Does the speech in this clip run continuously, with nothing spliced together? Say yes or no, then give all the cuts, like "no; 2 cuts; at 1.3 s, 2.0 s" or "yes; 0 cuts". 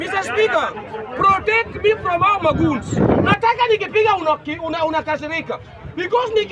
no; 1 cut; at 3.3 s